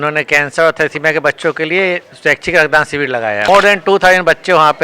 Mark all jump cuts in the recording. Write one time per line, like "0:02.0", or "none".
0:03.5